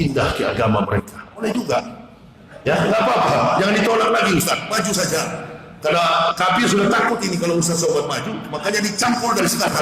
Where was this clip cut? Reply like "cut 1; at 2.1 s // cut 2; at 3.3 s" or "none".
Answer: cut 1; at 1.4 s